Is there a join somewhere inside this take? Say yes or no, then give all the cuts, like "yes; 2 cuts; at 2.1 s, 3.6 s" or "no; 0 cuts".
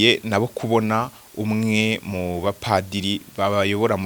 no; 0 cuts